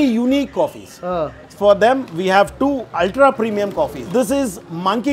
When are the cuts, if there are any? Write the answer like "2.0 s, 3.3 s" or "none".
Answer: 4.0 s